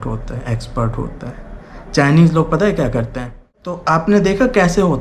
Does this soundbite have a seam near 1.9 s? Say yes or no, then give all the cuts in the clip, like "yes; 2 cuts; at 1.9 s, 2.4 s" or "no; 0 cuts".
no; 1 cut; at 3.6 s